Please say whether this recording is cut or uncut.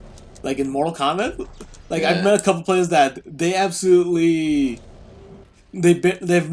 uncut